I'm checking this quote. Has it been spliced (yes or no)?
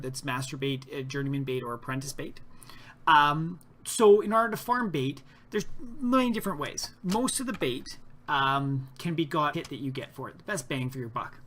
no